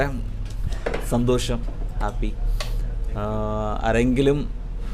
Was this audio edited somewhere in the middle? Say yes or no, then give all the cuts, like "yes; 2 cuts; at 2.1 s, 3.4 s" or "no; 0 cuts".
no; 0 cuts